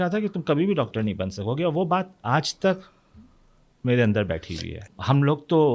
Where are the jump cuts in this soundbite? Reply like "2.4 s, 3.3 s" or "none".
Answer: 4.8 s